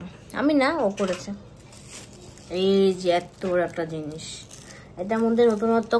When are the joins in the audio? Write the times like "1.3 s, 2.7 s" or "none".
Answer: none